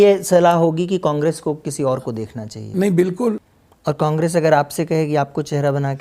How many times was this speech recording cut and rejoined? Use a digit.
1